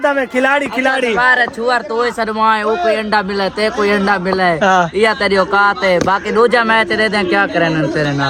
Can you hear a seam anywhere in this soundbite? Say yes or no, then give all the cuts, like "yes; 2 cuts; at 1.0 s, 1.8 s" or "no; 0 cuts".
no; 0 cuts